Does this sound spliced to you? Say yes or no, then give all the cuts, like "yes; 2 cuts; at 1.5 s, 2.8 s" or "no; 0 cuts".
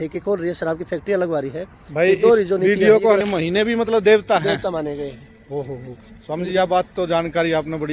yes; 1 cut; at 3.3 s